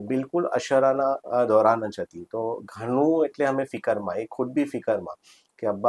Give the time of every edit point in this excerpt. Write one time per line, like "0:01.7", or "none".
0:01.2